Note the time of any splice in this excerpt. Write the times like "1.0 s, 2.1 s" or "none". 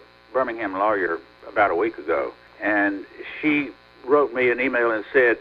1.3 s, 2.4 s, 3.9 s